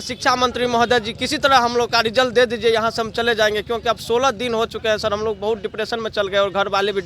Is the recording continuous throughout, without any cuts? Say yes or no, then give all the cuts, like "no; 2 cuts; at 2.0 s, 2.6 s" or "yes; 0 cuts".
yes; 0 cuts